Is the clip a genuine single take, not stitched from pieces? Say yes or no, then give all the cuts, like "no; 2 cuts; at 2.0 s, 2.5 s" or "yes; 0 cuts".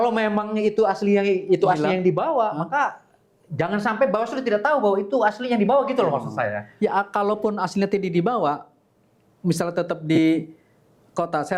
yes; 0 cuts